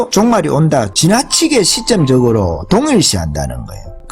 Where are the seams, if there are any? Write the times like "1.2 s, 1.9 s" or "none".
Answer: 0.9 s